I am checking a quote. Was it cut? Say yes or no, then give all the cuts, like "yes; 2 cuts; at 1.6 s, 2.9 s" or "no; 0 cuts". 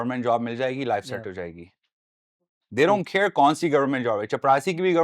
no; 0 cuts